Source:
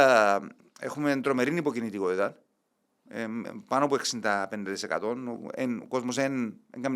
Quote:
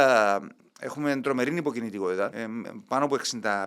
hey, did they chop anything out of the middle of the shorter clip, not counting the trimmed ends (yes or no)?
yes